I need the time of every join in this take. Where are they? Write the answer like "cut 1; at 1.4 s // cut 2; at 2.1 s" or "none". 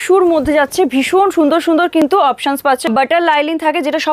cut 1; at 2.9 s